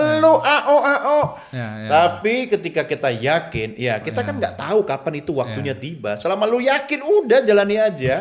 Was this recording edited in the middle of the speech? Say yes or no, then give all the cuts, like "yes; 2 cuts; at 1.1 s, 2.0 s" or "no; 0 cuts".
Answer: no; 0 cuts